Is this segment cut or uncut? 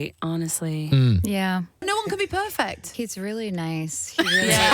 cut